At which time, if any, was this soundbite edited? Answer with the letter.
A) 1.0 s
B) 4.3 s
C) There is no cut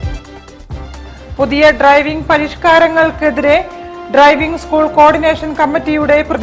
A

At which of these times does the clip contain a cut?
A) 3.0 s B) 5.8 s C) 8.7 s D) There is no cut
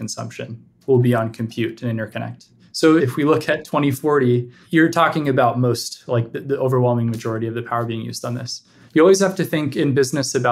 A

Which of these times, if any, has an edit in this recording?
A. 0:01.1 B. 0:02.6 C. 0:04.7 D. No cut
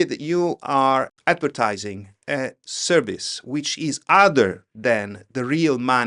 A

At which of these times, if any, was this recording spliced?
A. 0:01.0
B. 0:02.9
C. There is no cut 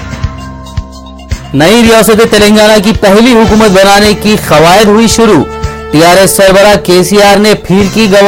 A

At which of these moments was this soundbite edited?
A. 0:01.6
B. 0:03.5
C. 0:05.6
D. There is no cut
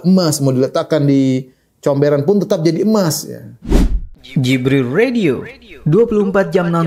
B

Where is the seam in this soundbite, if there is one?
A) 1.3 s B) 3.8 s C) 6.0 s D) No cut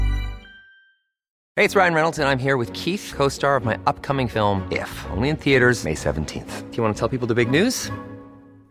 A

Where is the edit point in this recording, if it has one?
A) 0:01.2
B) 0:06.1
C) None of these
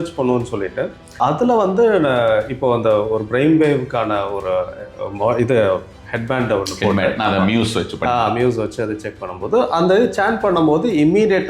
A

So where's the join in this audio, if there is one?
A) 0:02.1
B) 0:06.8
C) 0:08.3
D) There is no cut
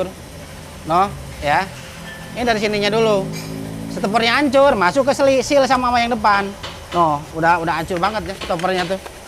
D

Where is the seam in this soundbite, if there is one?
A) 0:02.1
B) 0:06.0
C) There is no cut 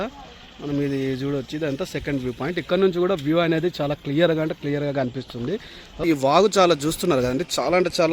B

